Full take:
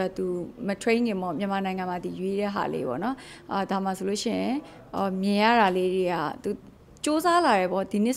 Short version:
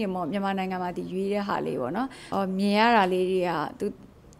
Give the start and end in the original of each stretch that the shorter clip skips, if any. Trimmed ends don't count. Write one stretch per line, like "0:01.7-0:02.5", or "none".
0:03.3-0:04.8